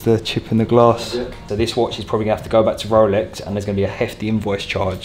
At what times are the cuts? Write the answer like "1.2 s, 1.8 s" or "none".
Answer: 1.4 s